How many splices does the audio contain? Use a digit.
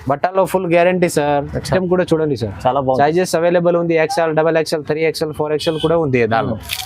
1